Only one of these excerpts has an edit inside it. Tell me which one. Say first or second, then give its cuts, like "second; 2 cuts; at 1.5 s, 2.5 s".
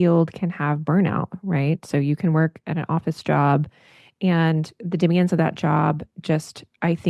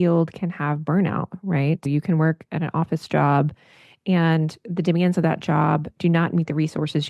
second; 2 cuts; at 1.9 s, 5.9 s